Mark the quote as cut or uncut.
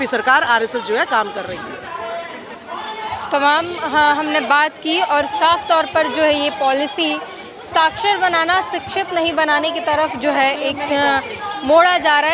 uncut